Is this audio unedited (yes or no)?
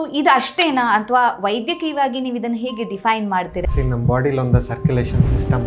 no